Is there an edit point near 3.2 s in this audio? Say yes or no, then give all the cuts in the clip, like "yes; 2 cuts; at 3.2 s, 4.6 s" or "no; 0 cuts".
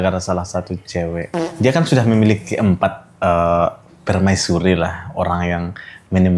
no; 1 cut; at 1.4 s